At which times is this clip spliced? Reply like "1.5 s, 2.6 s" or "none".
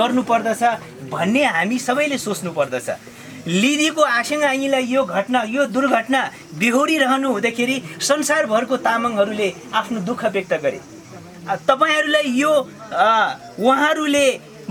none